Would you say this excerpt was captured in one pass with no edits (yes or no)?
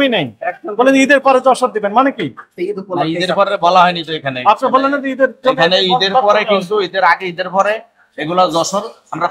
no